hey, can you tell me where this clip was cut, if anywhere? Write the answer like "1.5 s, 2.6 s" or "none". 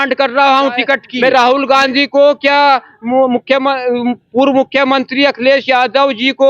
1.1 s